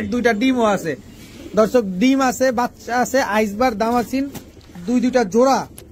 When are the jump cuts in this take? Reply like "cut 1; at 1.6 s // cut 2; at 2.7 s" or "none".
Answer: none